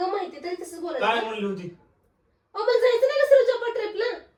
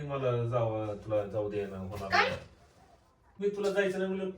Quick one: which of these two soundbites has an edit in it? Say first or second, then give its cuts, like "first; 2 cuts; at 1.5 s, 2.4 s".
second; 1 cut; at 3.4 s